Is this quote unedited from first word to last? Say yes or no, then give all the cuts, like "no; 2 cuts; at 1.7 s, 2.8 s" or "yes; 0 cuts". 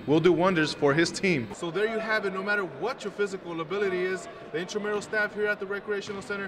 no; 1 cut; at 1.5 s